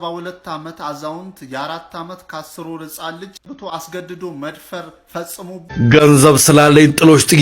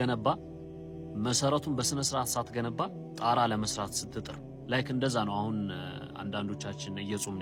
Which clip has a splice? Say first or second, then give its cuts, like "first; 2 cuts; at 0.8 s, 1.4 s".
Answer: first; 2 cuts; at 3.4 s, 5.6 s